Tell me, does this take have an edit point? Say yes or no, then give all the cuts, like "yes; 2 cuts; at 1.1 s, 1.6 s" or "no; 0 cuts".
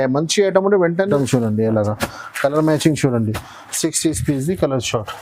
yes; 1 cut; at 1.1 s